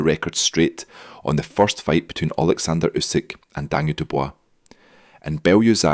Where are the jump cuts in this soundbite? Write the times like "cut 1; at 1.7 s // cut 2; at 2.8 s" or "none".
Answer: none